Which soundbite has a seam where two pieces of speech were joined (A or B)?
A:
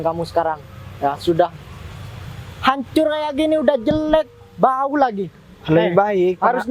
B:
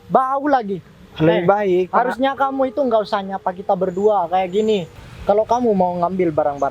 B